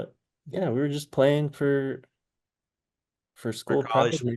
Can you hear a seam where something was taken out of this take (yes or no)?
no